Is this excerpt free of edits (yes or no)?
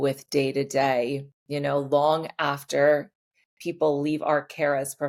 yes